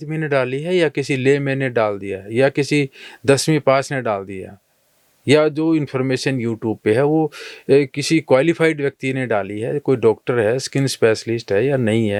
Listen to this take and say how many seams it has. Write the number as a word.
zero